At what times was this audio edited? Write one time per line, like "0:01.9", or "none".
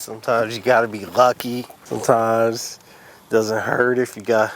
0:01.8

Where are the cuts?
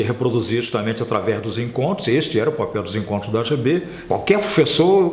0:03.9

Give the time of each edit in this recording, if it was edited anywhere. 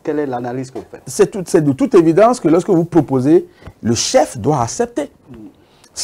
0:01.0

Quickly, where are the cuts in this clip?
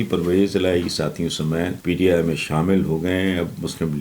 0:01.8

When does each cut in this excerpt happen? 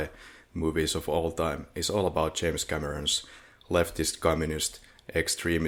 none

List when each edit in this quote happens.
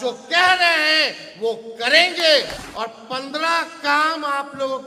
0:02.6

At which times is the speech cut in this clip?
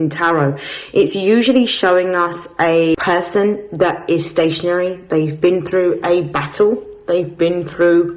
0:02.9

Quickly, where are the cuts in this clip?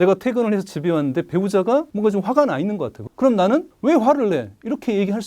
0:01.9
0:03.0
0:03.7

